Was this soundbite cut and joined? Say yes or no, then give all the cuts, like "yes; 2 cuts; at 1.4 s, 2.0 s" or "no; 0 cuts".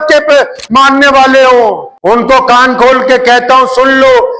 yes; 1 cut; at 1.9 s